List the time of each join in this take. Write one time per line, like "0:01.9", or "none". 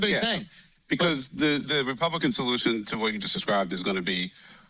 none